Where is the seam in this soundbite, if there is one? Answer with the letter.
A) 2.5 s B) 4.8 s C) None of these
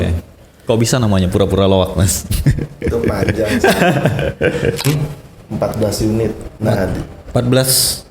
B